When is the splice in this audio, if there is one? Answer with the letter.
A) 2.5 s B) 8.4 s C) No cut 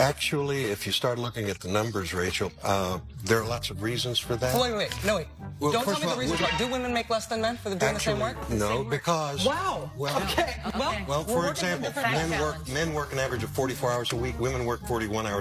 B